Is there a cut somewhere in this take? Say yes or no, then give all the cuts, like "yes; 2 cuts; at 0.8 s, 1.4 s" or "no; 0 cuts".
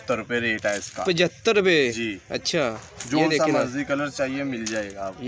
no; 0 cuts